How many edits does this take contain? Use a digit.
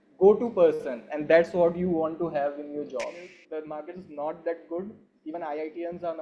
1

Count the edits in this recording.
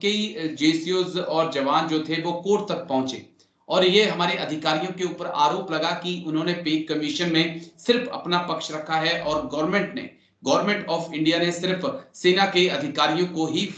0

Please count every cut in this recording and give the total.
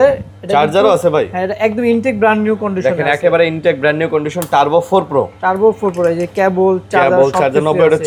0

